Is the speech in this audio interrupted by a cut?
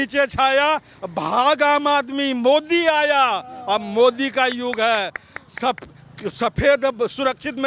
no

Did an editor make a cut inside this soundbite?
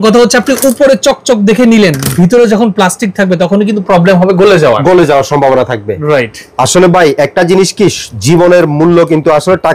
no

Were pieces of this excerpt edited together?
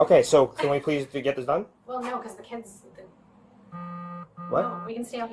no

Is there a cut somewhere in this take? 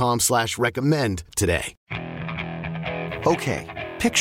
yes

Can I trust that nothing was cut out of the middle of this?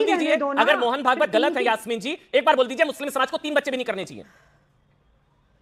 yes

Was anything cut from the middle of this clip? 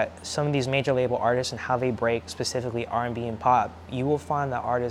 no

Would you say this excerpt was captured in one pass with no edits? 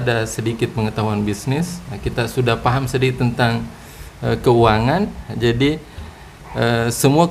yes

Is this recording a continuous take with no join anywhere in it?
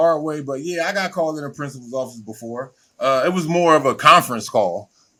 yes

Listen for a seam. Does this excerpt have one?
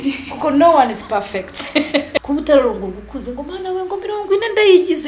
yes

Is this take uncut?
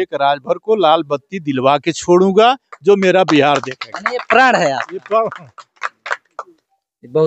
yes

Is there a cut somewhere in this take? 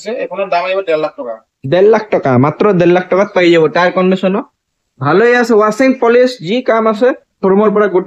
no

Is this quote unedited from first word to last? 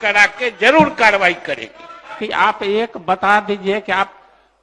no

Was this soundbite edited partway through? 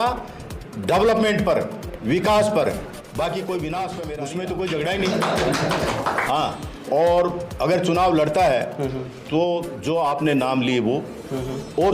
yes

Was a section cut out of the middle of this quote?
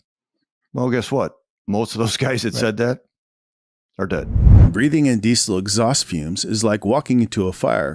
yes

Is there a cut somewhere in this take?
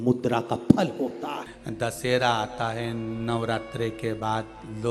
yes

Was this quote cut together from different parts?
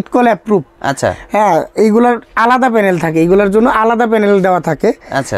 no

